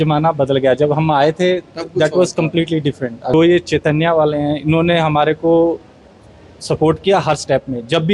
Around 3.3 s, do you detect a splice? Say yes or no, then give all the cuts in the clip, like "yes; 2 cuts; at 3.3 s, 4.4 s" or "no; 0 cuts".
yes; 1 cut; at 3.3 s